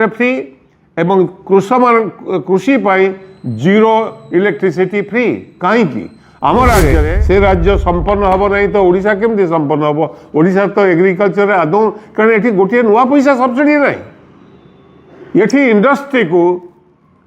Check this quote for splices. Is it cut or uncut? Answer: cut